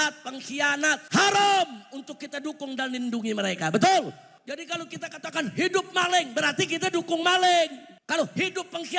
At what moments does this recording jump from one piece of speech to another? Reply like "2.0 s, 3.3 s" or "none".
1.0 s, 4.3 s, 7.9 s